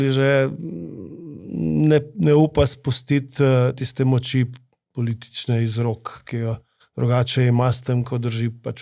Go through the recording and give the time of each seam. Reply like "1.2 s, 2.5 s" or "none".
none